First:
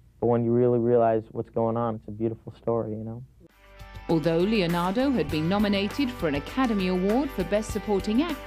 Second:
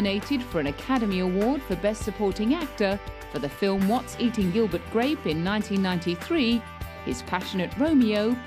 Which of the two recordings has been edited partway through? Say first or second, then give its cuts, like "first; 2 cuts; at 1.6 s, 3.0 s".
first; 1 cut; at 2.4 s